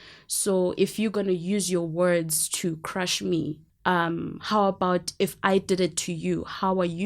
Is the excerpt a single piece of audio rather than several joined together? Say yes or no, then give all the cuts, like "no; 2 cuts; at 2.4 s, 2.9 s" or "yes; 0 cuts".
no; 1 cut; at 3.7 s